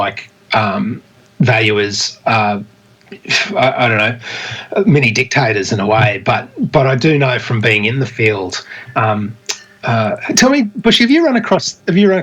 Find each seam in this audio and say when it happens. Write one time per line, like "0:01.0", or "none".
none